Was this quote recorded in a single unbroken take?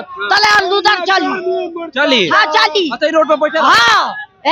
yes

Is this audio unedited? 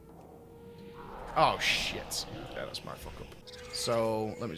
no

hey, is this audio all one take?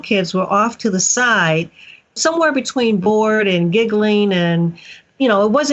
no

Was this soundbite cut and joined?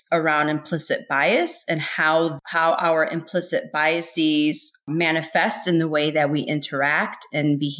no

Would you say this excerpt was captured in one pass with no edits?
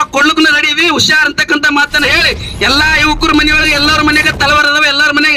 yes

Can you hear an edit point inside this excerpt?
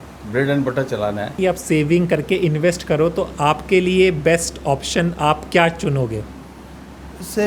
yes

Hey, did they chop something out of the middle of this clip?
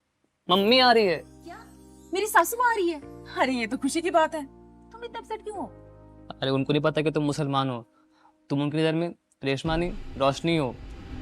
no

